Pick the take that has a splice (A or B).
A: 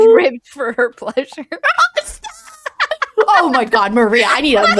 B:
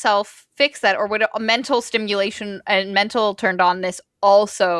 A